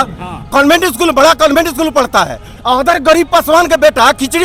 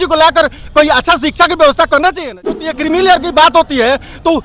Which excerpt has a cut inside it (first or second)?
second